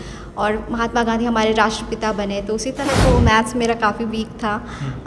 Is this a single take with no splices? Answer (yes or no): no